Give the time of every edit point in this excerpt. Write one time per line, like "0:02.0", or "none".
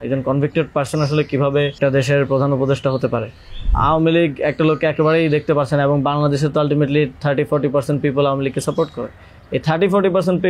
0:01.8
0:03.7

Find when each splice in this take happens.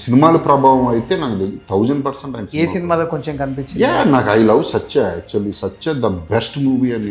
none

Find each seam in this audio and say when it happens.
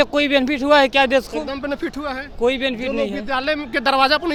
none

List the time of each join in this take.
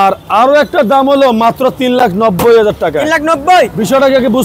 none

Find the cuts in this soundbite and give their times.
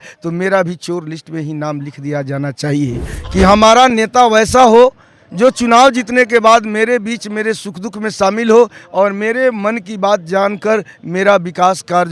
0:03.1

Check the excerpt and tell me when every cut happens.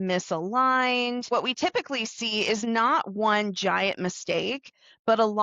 0:01.3

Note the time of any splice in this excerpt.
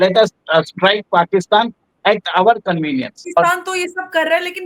0:03.2

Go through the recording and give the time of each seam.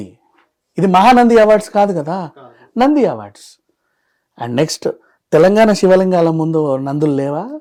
none

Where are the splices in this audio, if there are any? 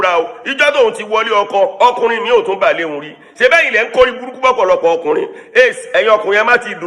none

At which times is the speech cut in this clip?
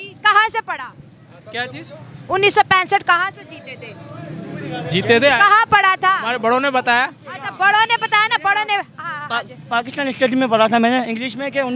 none

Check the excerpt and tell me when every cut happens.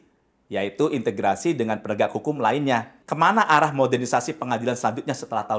0:03.0

